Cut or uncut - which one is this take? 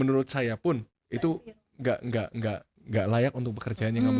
cut